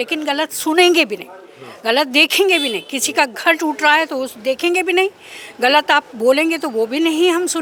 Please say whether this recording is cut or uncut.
uncut